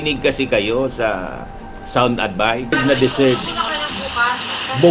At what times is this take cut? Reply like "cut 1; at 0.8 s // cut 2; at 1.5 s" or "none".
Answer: cut 1; at 2.7 s